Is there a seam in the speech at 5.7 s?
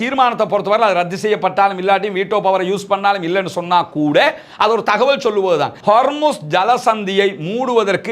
yes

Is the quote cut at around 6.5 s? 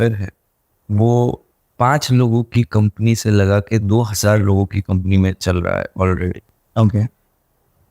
no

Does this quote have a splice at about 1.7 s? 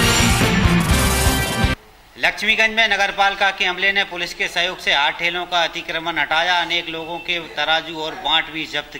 yes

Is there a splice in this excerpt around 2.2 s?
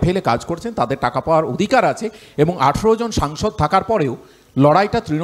no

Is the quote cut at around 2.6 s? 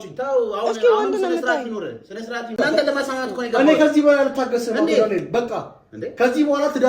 yes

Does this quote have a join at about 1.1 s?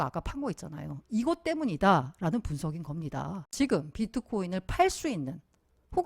no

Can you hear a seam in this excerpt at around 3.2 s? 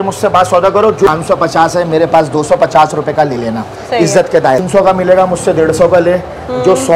no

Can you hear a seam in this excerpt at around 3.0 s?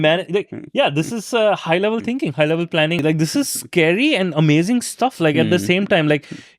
yes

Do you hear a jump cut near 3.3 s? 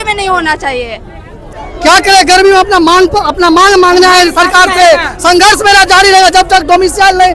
no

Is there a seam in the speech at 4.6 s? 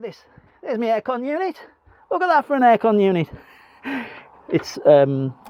yes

